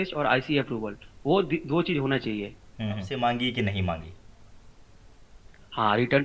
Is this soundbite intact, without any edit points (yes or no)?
no